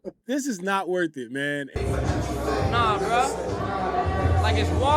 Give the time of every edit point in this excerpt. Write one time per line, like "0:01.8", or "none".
0:01.7